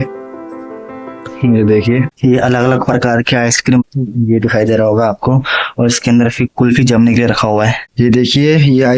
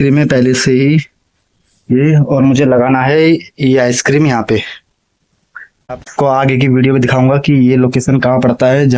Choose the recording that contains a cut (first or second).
first